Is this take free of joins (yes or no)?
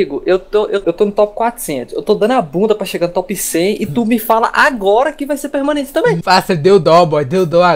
no